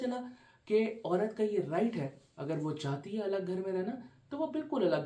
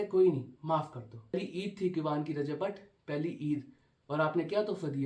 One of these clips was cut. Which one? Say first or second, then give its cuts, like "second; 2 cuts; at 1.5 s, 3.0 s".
second; 1 cut; at 1.3 s